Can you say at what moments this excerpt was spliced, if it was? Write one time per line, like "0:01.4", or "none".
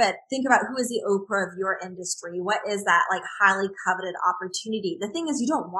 none